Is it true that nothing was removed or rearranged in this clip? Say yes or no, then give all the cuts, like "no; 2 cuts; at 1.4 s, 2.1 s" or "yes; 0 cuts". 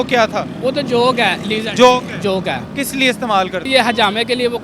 no; 2 cuts; at 2.7 s, 3.7 s